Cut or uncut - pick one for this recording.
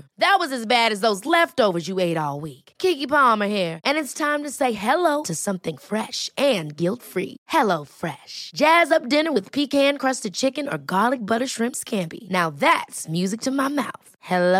uncut